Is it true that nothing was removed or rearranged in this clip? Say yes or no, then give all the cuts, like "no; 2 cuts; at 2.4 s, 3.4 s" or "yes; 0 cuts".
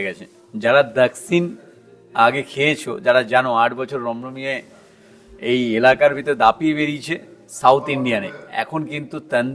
yes; 0 cuts